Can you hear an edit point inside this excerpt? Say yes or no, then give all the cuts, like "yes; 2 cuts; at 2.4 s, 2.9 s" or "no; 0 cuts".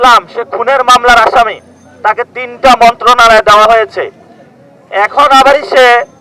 no; 0 cuts